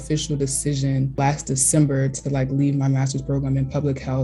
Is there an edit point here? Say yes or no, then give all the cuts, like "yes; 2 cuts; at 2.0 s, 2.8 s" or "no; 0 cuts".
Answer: yes; 1 cut; at 1.2 s